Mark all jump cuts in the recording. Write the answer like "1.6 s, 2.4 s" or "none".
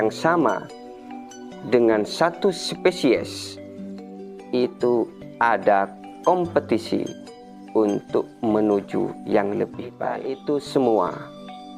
10.1 s

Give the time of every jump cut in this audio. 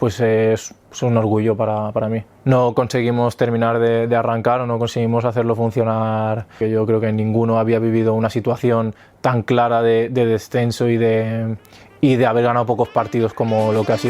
2.3 s, 6.6 s

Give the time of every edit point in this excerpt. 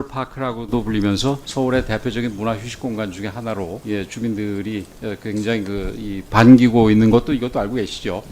1.4 s, 3.8 s, 4.9 s

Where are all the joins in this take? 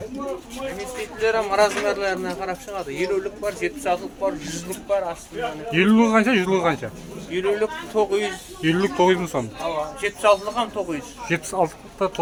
none

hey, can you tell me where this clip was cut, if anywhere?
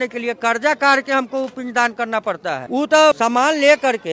2.6 s, 3.2 s

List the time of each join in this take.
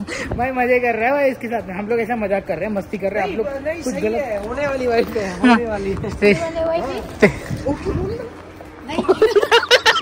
none

